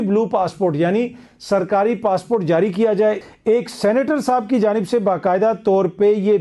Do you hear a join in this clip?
no; 0 cuts

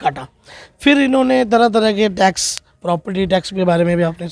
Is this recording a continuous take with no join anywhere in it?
yes; 0 cuts

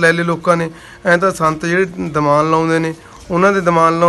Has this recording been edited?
no; 0 cuts

